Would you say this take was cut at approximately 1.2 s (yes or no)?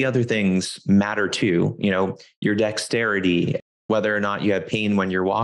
no